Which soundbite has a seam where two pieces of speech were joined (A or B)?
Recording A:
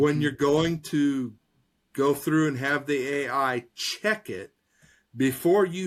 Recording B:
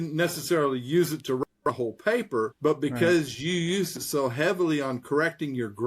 B